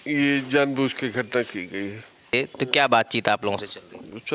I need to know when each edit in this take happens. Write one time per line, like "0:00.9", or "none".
0:02.3